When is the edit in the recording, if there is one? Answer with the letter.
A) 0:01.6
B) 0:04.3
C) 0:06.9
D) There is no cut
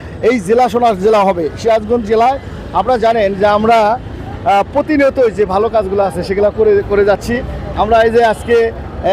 D